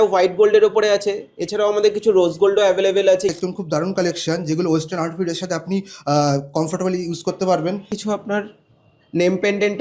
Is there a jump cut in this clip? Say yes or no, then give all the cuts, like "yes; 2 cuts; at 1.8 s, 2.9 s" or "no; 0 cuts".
yes; 2 cuts; at 3.3 s, 7.9 s